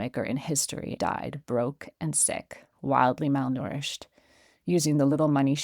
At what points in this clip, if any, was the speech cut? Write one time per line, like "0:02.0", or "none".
0:01.0